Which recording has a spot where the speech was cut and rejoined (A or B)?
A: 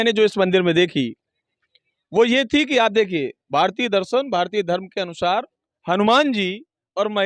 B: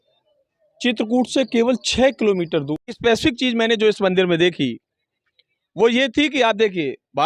B